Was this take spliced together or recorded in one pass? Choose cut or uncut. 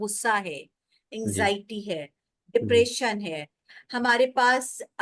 uncut